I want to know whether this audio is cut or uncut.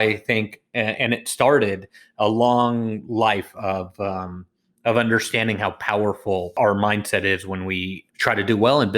cut